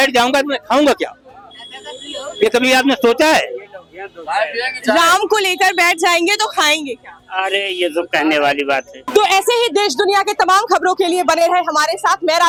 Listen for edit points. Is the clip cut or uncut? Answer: uncut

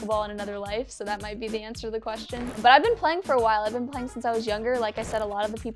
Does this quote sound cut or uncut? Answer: cut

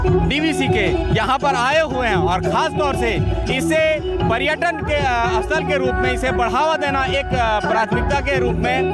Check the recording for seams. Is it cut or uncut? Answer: uncut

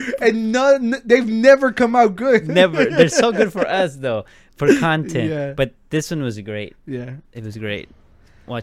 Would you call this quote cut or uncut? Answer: uncut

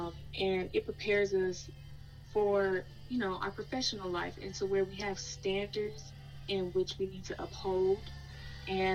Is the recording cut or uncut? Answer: cut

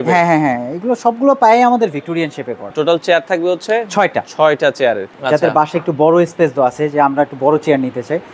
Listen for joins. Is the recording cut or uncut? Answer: cut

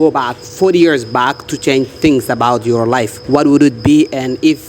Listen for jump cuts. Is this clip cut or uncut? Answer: cut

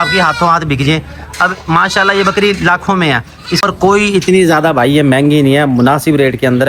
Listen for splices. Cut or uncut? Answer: cut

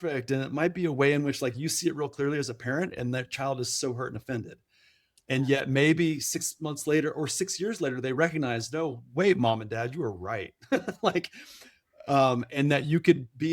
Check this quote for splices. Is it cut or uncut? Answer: uncut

